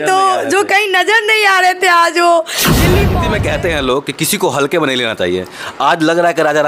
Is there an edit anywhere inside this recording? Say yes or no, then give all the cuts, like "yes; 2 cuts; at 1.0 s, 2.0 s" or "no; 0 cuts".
yes; 1 cut; at 3.1 s